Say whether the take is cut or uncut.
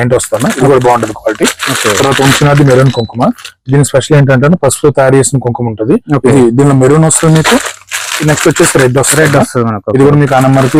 uncut